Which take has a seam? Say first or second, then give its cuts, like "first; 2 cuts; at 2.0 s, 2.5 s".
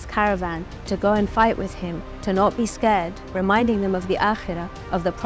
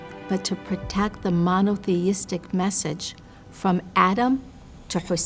first; 1 cut; at 3.2 s